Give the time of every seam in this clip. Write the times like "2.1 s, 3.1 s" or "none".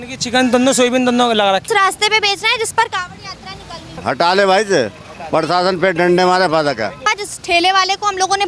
1.6 s, 3.9 s, 7.0 s